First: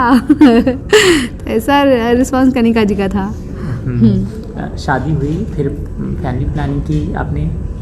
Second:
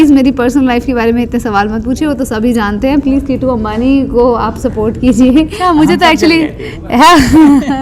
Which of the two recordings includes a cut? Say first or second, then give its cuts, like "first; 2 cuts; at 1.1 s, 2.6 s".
second; 1 cut; at 5.6 s